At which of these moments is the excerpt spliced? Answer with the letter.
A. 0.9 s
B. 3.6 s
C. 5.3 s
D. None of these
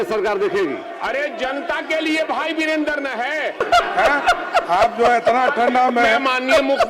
B